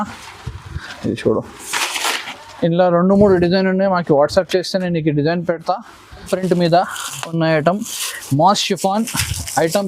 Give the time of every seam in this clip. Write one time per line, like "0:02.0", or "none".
0:06.3